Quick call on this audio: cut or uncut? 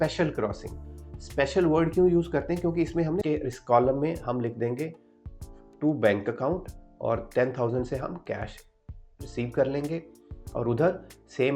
cut